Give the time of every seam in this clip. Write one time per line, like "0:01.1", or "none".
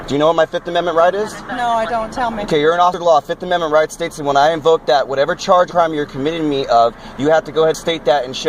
none